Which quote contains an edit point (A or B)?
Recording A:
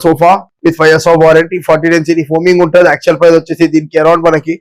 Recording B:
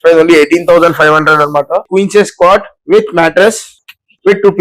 B